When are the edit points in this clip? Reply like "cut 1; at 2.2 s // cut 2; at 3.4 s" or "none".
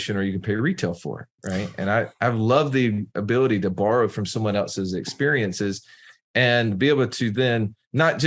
none

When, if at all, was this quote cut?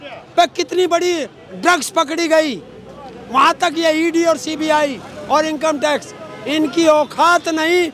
none

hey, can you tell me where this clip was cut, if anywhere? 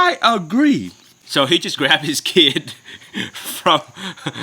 cut 1; at 1.2 s

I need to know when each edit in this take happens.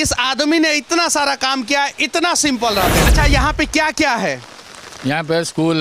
cut 1; at 3.1 s

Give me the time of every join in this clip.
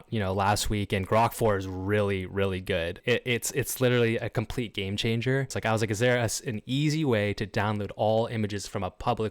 cut 1; at 3.0 s // cut 2; at 5.5 s

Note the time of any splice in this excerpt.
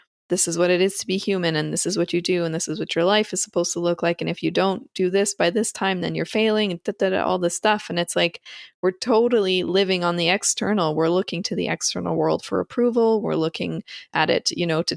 none

